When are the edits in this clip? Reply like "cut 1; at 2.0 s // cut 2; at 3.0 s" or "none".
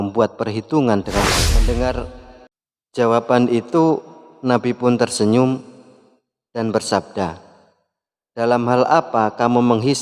cut 1; at 1.5 s